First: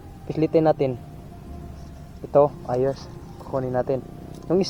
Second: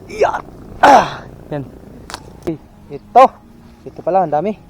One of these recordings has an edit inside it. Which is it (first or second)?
second